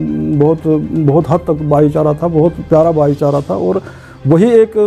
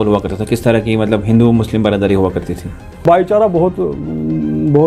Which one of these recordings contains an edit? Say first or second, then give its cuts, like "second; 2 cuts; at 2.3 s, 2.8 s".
second; 1 cut; at 3.0 s